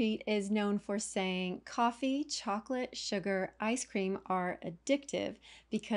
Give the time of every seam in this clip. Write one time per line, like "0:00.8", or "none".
none